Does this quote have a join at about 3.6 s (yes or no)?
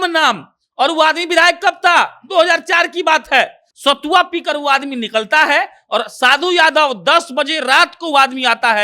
yes